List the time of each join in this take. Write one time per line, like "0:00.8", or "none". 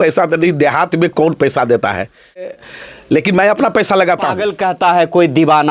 0:02.5
0:04.5